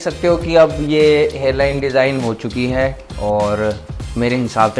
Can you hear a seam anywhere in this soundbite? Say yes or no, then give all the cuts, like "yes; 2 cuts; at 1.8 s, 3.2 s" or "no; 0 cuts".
no; 0 cuts